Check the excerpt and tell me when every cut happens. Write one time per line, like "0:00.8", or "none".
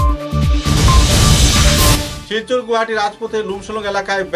0:02.1